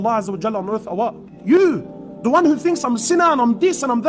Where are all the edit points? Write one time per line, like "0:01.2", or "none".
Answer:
0:01.4